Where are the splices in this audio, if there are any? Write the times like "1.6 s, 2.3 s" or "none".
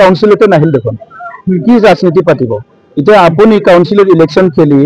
none